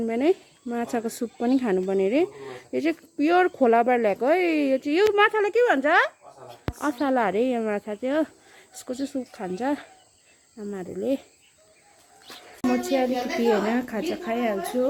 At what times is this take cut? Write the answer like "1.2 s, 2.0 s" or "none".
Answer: none